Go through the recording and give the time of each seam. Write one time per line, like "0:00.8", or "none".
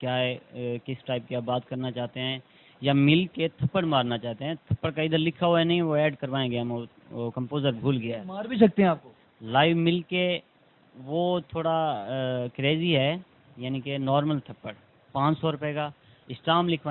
none